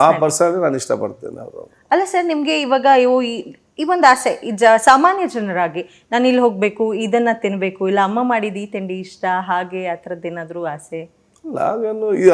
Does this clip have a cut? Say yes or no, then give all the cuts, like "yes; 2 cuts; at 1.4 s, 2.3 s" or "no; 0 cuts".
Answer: no; 0 cuts